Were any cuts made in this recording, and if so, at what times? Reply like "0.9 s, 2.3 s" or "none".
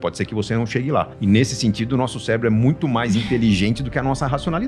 1.1 s